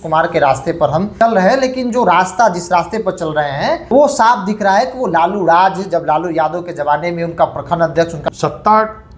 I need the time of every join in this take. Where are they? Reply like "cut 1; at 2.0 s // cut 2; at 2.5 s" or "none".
cut 1; at 1.1 s // cut 2; at 3.8 s // cut 3; at 8.2 s